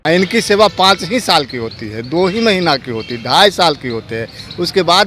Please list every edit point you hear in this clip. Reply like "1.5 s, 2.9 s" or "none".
none